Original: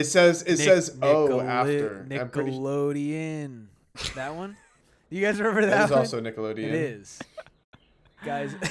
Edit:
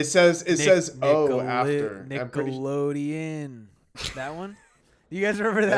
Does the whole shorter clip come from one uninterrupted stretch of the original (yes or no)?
yes